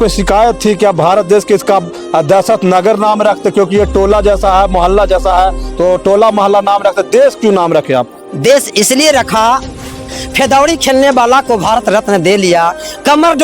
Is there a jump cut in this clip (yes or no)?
yes